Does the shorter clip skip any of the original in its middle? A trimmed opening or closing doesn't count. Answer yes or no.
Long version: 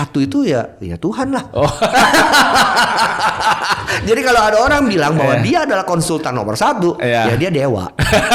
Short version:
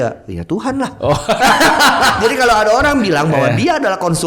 yes